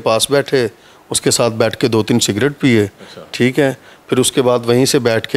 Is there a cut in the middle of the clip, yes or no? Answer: no